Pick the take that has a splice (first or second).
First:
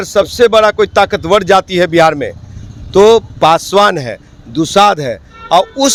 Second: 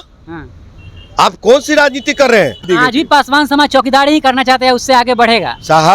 second